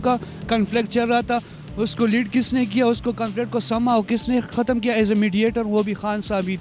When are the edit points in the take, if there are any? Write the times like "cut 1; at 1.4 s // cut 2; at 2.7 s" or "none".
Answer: none